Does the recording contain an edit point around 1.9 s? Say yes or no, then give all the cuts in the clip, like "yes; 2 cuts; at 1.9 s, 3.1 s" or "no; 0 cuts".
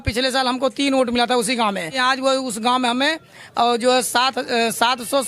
yes; 1 cut; at 1.9 s